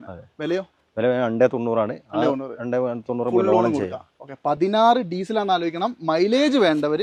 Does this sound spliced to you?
no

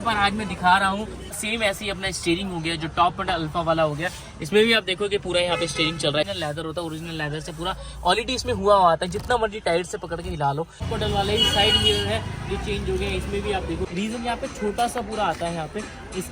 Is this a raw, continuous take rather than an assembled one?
no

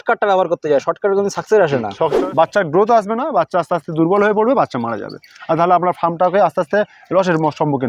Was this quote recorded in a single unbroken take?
no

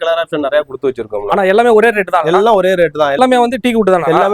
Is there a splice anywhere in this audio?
yes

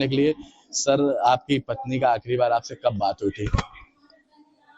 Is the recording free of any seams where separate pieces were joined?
no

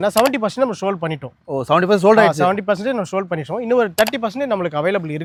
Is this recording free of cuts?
yes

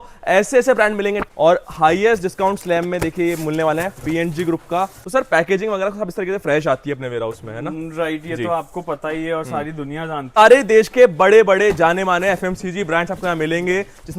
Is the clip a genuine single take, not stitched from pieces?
no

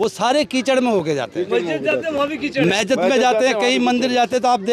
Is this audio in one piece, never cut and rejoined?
yes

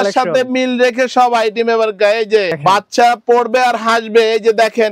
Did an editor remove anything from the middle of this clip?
yes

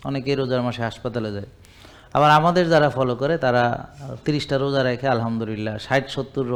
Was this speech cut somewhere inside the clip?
no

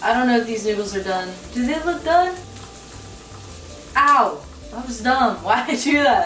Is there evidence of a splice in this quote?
no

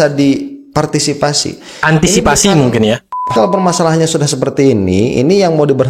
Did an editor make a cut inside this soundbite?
yes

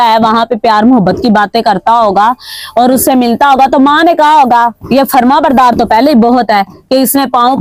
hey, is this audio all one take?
yes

